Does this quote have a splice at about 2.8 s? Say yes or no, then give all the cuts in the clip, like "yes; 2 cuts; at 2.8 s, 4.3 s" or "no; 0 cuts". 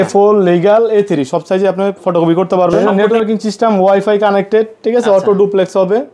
yes; 1 cut; at 2.8 s